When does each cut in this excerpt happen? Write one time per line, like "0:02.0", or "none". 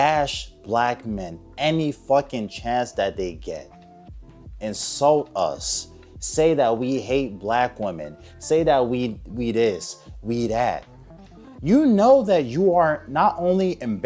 none